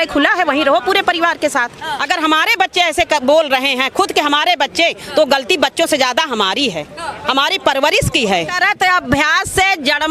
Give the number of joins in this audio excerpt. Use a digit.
2